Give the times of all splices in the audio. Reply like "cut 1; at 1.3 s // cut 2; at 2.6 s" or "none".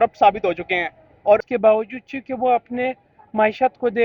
cut 1; at 1.4 s